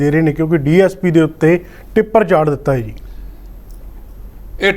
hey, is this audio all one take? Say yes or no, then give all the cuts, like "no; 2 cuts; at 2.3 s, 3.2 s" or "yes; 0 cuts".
yes; 0 cuts